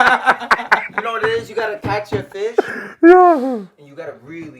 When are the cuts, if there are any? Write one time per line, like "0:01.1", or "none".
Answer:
none